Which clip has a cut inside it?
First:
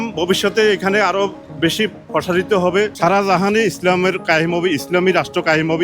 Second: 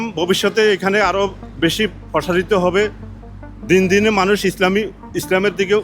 first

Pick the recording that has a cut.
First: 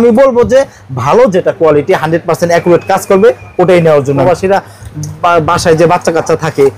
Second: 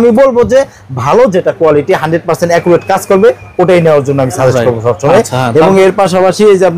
first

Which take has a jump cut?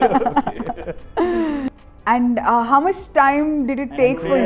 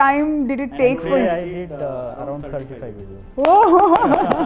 first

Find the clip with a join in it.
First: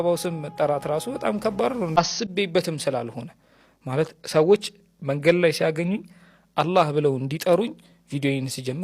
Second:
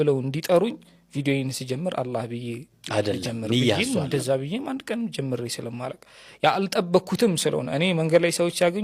first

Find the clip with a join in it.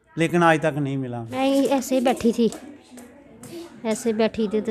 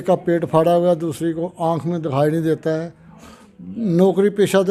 first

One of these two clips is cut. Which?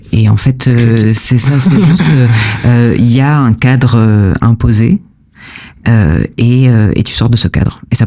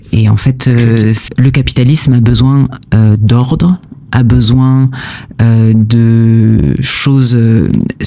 second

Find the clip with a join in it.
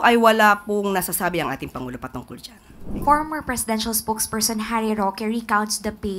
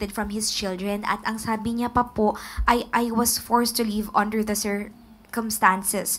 first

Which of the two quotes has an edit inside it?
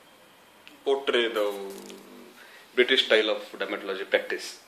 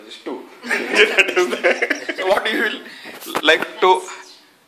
second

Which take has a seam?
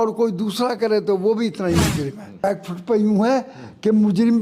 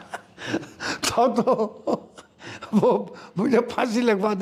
first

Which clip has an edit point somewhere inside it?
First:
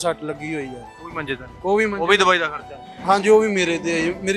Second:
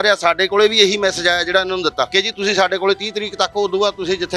second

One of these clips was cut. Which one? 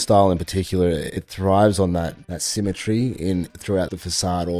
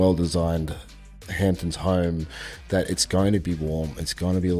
first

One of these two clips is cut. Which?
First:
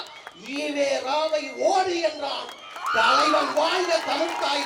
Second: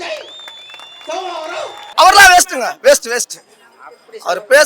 second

